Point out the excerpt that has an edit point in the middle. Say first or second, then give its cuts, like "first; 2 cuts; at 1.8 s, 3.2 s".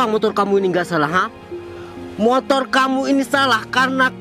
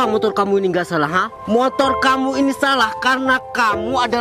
second; 1 cut; at 1.3 s